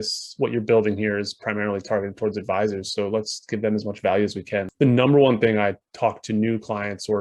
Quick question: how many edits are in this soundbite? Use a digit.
1